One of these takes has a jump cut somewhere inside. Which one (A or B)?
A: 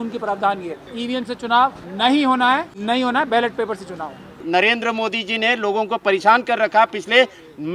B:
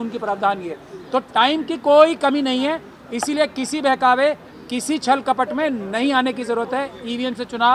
A